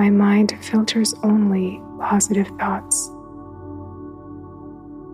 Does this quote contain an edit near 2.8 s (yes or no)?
yes